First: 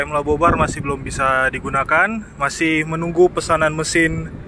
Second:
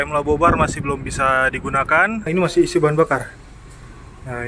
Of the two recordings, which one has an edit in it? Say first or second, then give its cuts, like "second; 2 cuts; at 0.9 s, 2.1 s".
second; 1 cut; at 2.3 s